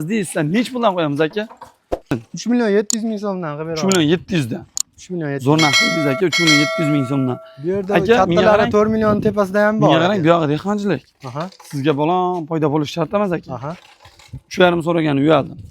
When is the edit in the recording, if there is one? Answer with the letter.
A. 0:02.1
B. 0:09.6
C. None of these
A